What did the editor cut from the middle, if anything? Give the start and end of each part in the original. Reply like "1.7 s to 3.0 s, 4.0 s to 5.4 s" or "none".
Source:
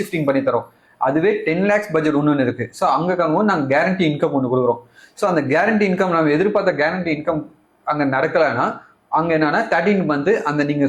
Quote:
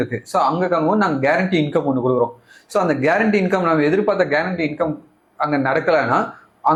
none